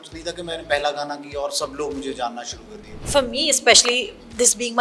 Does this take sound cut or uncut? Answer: cut